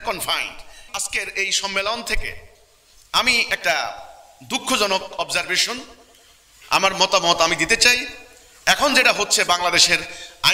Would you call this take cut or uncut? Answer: uncut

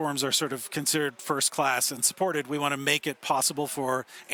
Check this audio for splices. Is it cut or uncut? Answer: uncut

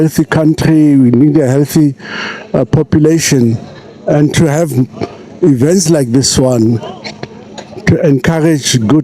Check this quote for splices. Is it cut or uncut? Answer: uncut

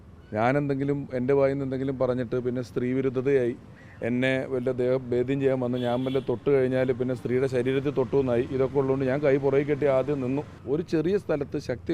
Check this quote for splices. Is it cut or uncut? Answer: cut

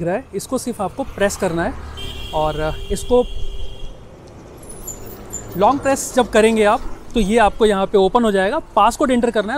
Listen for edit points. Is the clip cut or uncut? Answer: uncut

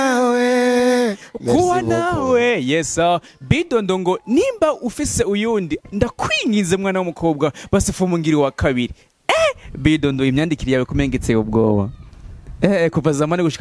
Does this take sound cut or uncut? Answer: uncut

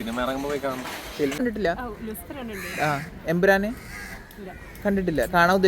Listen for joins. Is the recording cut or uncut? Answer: cut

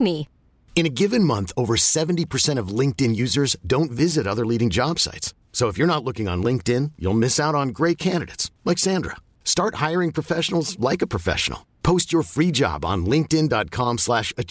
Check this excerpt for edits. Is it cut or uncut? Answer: uncut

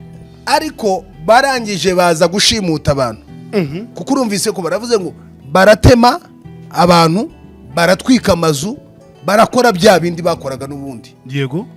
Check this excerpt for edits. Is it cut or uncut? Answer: uncut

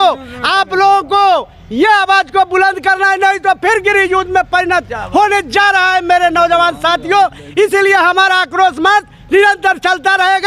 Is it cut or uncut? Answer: uncut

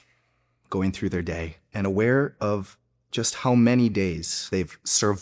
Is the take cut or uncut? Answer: cut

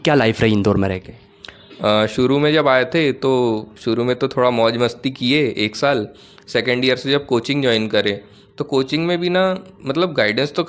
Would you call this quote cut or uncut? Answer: uncut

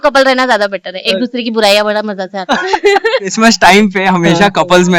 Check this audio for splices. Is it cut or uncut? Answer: cut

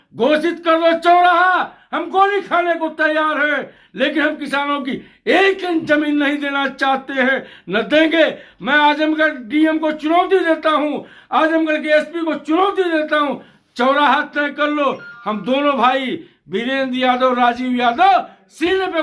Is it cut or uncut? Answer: uncut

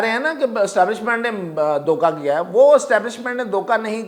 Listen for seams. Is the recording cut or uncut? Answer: uncut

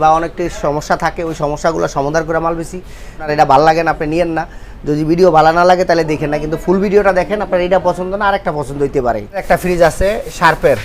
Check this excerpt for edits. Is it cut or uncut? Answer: cut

